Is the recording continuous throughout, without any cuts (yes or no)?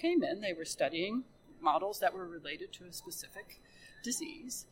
no